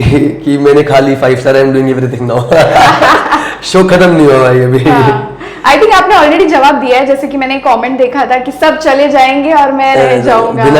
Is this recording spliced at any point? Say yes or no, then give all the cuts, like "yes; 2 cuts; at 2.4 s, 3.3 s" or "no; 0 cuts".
no; 0 cuts